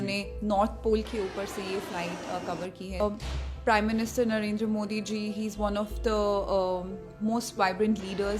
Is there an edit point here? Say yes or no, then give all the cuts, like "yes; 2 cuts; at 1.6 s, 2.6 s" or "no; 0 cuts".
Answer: yes; 1 cut; at 3.0 s